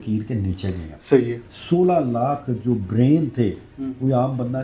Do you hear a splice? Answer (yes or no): no